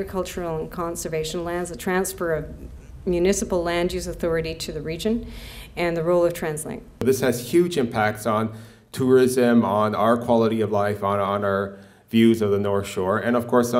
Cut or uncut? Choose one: cut